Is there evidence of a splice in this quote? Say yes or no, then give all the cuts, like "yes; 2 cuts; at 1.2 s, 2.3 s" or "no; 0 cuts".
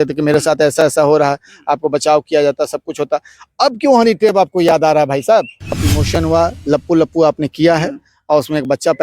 yes; 1 cut; at 5.8 s